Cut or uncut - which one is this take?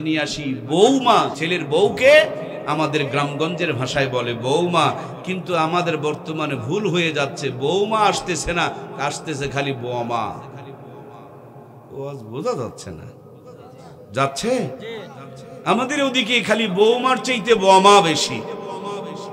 cut